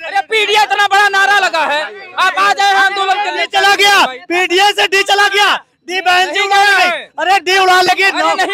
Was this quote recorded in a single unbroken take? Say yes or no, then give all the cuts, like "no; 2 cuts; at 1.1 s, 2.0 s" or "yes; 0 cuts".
yes; 0 cuts